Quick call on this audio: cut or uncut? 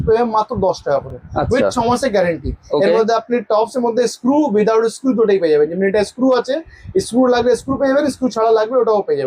uncut